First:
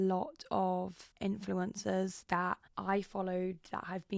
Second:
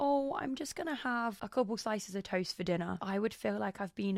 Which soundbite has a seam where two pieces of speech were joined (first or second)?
second